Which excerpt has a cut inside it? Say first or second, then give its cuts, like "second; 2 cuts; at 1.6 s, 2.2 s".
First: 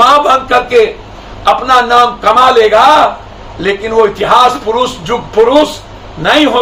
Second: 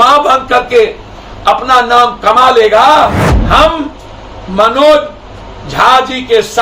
second; 1 cut; at 3.3 s